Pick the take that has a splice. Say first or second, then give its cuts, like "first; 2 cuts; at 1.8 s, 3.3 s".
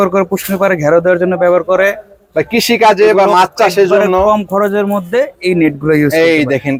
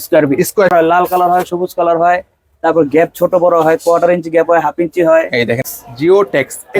second; 2 cuts; at 0.7 s, 5.6 s